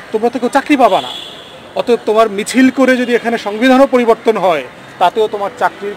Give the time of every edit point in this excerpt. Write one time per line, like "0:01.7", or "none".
none